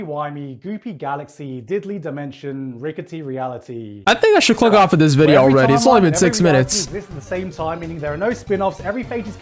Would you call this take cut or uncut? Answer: uncut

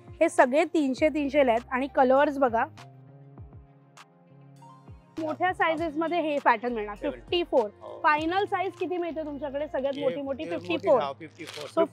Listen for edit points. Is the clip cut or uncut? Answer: uncut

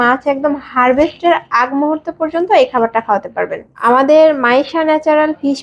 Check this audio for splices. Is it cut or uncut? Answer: uncut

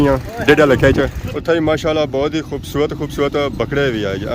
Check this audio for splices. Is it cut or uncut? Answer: cut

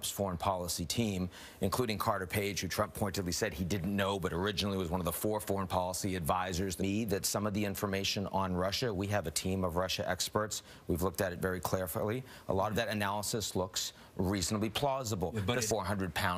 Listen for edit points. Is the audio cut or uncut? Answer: cut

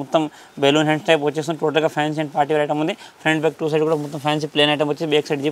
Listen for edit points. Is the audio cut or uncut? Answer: uncut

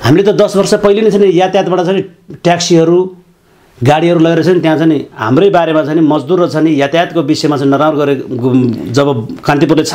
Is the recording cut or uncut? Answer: uncut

